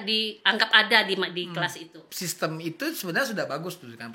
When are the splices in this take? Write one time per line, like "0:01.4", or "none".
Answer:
0:02.0